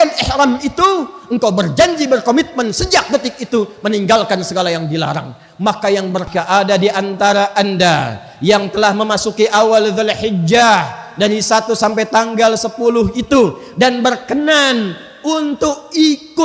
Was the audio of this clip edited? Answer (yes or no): yes